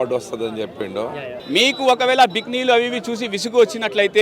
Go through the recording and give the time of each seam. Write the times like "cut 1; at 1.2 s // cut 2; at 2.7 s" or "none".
cut 1; at 1.3 s